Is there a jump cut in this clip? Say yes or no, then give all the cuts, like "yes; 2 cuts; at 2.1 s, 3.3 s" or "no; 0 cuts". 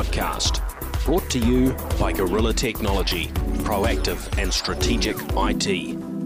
no; 0 cuts